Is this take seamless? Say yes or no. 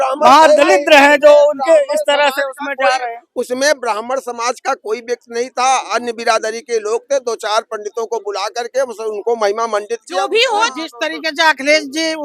yes